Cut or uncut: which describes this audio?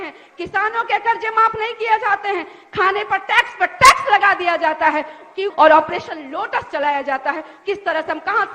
cut